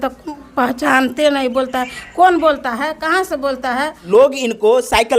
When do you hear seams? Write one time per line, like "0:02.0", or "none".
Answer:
0:04.0